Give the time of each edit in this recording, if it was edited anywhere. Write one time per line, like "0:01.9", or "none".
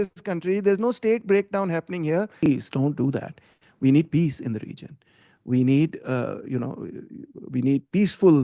0:02.4